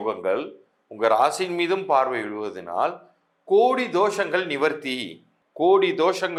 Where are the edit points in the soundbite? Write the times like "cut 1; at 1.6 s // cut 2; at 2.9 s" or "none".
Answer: none